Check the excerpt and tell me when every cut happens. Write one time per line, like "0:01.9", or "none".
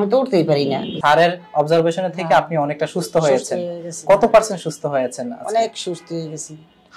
0:01.0